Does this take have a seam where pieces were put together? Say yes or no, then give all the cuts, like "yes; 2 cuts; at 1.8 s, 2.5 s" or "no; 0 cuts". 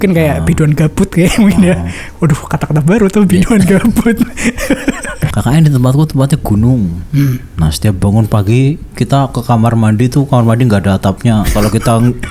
yes; 1 cut; at 5.2 s